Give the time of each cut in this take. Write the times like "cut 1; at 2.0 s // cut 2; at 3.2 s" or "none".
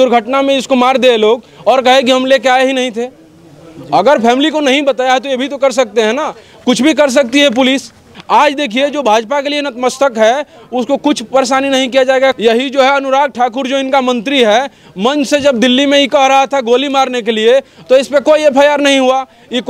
cut 1; at 8.1 s // cut 2; at 12.4 s

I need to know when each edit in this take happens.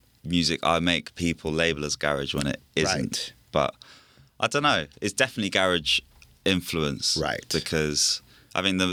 none

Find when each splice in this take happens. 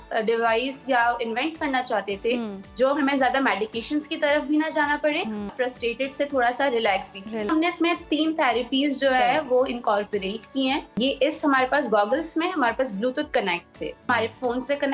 cut 1; at 5.5 s // cut 2; at 7.5 s // cut 3; at 10.9 s // cut 4; at 14.1 s

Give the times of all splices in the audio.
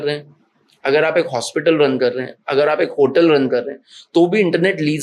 none

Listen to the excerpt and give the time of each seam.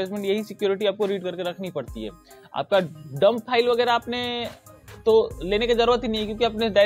none

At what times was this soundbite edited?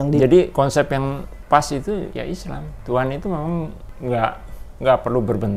cut 1; at 1.3 s // cut 2; at 2.3 s // cut 3; at 3.8 s

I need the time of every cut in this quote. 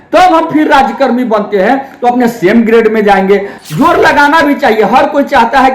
cut 1; at 3.6 s

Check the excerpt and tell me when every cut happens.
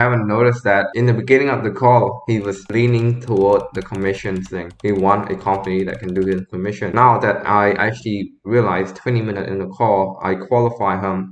cut 1; at 0.9 s // cut 2; at 6.9 s

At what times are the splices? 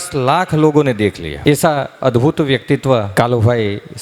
cut 1; at 1.3 s // cut 2; at 3.1 s

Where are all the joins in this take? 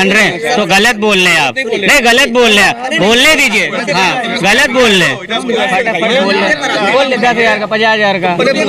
none

